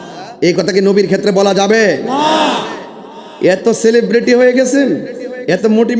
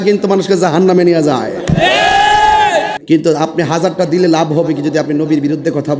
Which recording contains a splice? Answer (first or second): second